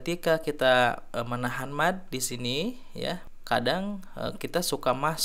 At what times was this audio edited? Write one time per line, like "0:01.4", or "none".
0:03.3